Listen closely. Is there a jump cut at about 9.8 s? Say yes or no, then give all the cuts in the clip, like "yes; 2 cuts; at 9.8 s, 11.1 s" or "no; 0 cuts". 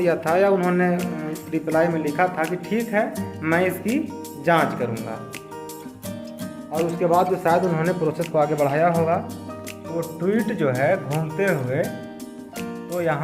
no; 2 cuts; at 5.4 s, 6.7 s